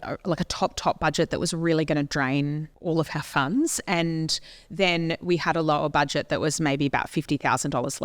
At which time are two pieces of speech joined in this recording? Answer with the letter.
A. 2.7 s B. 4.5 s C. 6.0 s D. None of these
A